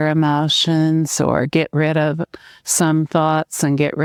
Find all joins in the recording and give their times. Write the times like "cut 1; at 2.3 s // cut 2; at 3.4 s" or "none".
none